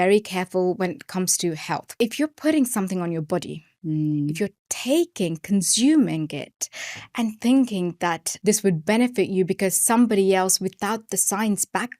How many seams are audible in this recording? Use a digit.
2